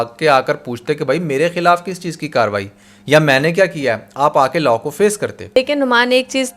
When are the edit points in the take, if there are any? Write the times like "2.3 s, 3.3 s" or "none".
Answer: 5.4 s